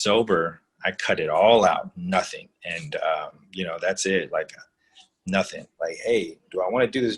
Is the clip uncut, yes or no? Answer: no